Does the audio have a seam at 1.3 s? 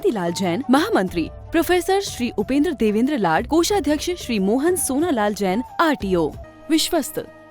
no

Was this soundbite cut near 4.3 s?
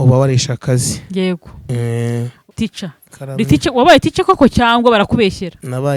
no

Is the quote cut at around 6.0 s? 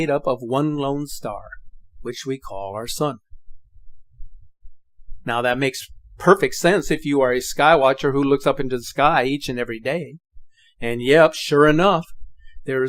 no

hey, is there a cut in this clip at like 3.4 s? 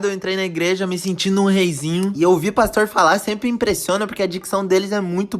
no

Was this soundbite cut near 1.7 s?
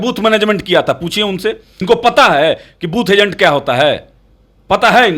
yes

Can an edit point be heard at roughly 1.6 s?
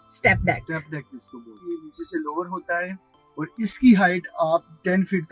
yes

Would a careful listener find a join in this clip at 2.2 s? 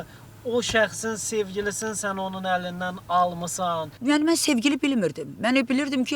no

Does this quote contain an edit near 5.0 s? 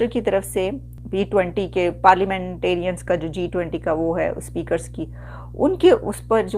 no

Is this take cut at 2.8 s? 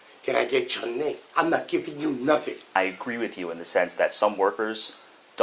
yes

